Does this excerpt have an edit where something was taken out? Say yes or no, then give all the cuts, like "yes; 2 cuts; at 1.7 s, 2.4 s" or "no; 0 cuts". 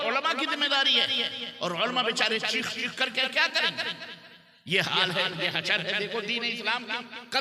no; 0 cuts